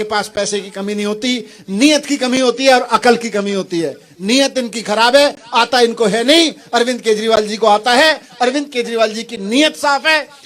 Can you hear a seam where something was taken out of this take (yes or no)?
no